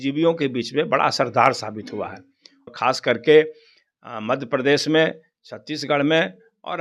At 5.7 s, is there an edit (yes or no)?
no